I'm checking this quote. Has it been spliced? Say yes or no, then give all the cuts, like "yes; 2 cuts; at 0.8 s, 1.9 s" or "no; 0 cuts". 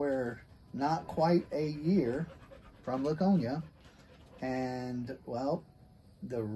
no; 0 cuts